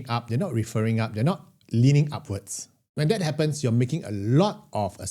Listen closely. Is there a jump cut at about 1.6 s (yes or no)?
no